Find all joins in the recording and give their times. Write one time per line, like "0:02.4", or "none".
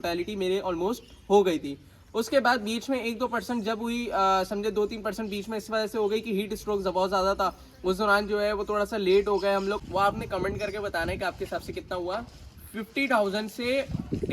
0:09.8